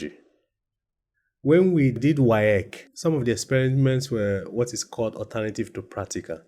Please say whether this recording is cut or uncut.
cut